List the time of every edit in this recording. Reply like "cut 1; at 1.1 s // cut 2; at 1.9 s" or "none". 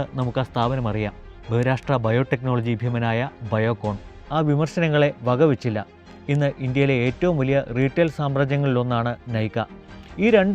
cut 1; at 4.2 s